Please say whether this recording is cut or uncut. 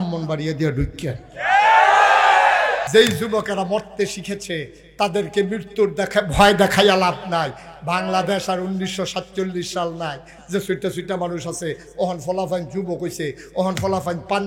cut